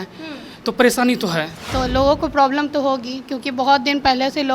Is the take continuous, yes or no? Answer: no